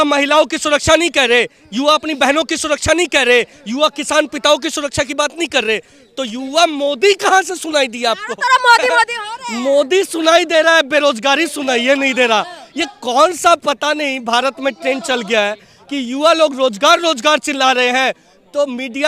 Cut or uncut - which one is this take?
uncut